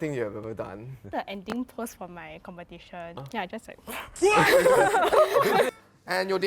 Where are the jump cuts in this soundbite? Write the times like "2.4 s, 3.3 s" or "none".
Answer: 1.1 s, 3.2 s, 5.7 s